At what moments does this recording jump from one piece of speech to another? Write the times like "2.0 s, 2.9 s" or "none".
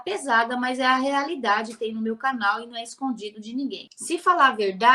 3.9 s